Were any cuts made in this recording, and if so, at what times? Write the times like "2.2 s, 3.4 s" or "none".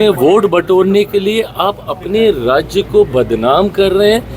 none